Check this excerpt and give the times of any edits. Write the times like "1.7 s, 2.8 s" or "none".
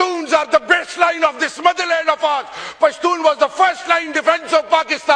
none